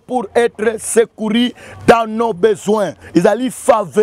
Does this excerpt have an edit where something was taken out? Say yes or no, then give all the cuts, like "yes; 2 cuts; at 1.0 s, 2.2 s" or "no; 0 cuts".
yes; 1 cut; at 3.0 s